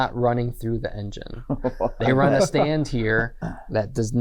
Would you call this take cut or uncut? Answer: uncut